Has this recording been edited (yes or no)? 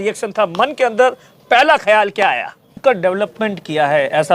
yes